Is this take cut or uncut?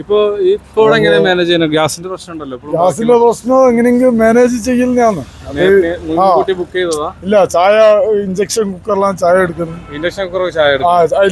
uncut